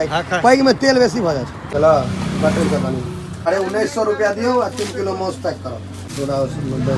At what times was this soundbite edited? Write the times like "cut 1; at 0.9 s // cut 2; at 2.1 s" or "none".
cut 1; at 1.6 s // cut 2; at 3.2 s // cut 3; at 6.1 s